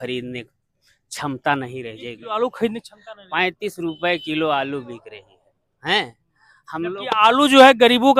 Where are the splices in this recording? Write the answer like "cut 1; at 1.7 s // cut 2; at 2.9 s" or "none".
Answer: none